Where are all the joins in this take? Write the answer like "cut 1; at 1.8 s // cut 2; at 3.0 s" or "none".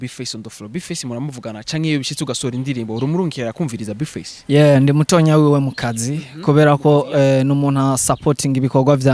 none